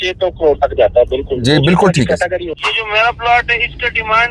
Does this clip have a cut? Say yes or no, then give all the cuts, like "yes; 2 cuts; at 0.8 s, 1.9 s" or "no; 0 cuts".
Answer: yes; 1 cut; at 2.6 s